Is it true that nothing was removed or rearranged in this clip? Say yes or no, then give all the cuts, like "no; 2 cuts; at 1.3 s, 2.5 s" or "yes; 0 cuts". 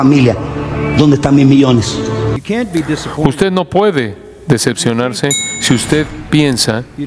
no; 1 cut; at 2.3 s